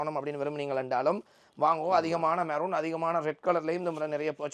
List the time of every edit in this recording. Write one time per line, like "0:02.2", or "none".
none